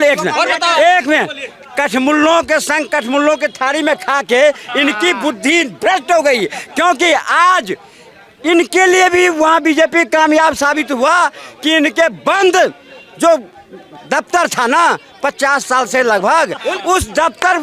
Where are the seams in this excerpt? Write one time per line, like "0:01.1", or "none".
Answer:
none